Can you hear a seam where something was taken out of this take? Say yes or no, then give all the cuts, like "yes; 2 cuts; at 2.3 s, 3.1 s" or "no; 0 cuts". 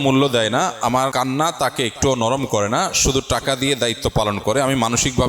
yes; 1 cut; at 1.1 s